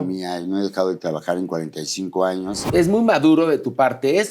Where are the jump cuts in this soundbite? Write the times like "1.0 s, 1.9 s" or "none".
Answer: 2.7 s